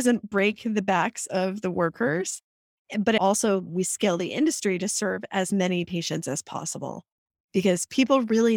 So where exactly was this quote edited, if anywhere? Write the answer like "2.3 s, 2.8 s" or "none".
3.2 s

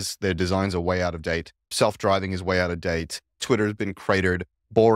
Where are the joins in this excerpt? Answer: 3.4 s

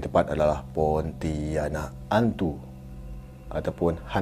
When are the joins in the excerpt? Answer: 1.9 s

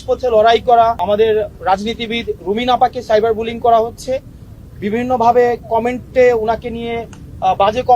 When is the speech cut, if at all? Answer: 1.0 s

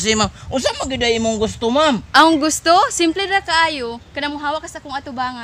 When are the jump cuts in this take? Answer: 2.0 s

